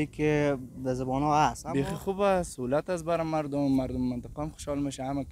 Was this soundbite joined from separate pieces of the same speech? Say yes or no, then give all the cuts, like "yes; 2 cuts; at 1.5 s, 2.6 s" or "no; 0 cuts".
yes; 1 cut; at 1.6 s